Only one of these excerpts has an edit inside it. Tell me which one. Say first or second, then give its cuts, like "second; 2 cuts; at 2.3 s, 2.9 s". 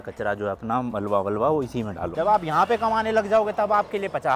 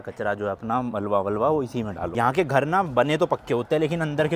first; 1 cut; at 2.1 s